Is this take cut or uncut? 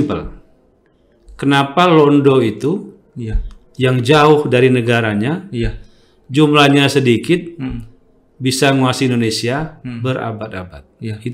uncut